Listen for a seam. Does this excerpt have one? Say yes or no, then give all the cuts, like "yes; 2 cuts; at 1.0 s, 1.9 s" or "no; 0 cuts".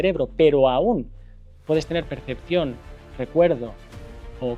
no; 0 cuts